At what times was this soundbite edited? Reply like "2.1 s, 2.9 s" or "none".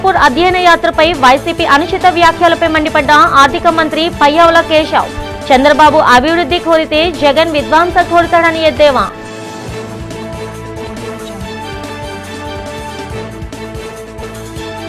none